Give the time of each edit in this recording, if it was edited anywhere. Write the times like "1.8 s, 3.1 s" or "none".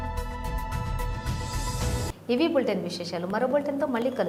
none